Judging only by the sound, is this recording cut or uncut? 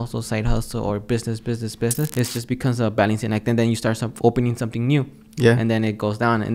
cut